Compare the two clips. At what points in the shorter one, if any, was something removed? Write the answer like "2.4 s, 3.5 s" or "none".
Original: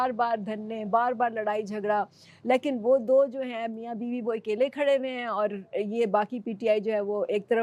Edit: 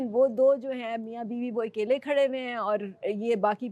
none